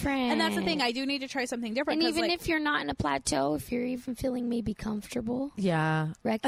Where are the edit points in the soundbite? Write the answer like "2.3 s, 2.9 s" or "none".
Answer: none